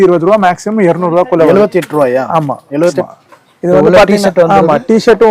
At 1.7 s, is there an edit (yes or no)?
no